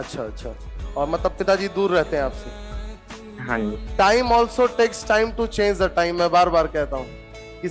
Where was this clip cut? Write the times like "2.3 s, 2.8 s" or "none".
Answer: 3.9 s